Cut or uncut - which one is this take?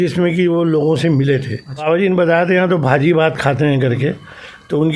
cut